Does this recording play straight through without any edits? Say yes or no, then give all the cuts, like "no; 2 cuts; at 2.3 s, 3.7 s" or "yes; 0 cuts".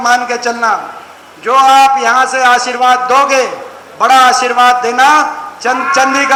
yes; 0 cuts